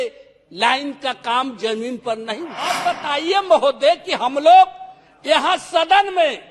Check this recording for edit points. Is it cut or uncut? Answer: cut